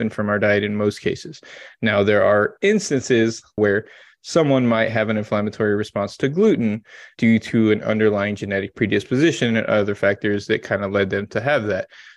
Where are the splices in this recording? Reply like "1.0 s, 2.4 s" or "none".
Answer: 3.6 s, 7.0 s